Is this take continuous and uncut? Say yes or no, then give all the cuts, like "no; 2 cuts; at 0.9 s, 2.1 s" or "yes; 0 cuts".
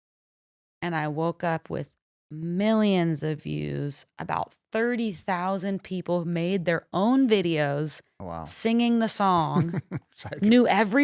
yes; 0 cuts